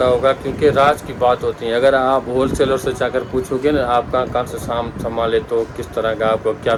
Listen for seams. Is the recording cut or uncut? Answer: uncut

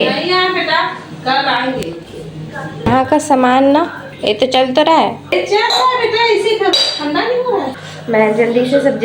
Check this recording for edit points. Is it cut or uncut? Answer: cut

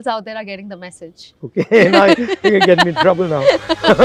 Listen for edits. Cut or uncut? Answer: uncut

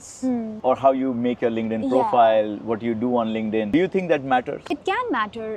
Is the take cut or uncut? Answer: uncut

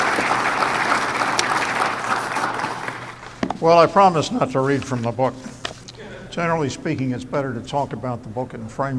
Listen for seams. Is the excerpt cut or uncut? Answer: cut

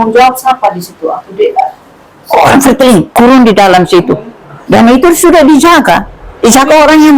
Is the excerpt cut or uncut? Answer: cut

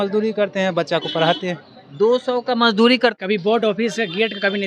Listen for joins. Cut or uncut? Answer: cut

